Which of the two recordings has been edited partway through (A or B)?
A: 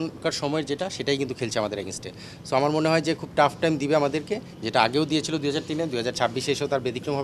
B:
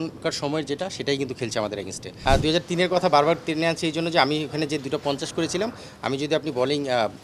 B